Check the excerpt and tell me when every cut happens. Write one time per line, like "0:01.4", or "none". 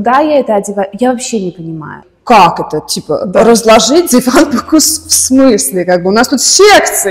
0:02.0